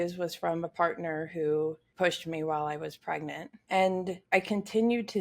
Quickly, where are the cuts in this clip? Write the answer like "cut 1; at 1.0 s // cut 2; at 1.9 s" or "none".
cut 1; at 1.8 s // cut 2; at 3.5 s // cut 3; at 4.2 s